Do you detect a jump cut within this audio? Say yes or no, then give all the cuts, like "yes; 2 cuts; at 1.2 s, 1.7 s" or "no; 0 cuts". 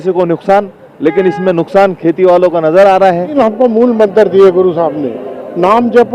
yes; 1 cut; at 3.4 s